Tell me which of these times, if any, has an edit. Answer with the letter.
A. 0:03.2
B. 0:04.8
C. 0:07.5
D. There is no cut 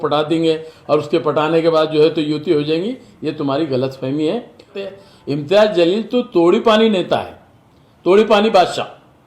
B